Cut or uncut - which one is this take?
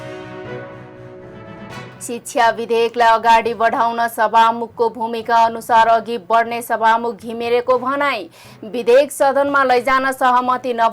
cut